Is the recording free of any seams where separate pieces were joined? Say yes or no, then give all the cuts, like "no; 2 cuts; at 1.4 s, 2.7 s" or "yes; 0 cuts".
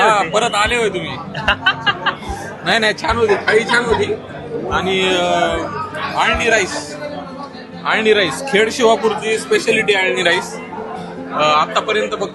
yes; 0 cuts